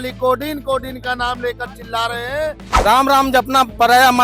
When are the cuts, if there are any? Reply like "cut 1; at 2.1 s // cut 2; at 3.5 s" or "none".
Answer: cut 1; at 2.7 s